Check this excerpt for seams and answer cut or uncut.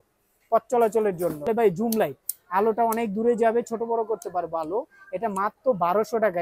cut